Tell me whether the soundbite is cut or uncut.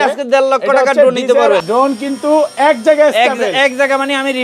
cut